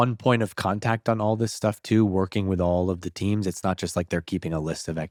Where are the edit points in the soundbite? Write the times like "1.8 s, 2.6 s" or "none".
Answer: none

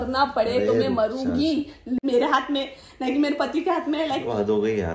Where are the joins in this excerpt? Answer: 2.0 s

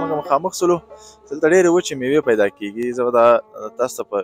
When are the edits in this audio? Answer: none

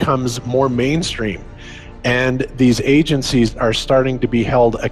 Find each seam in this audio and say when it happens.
none

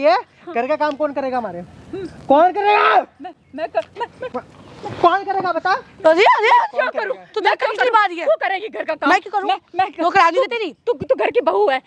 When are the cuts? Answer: none

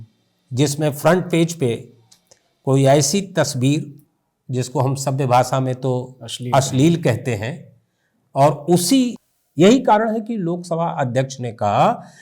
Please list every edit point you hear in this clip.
9.2 s

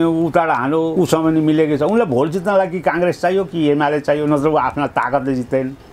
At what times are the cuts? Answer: 0.9 s

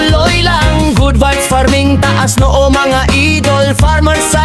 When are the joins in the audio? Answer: none

